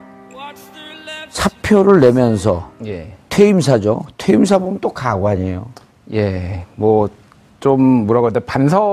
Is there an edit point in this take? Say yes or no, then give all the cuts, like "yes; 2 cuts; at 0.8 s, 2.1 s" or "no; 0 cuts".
no; 0 cuts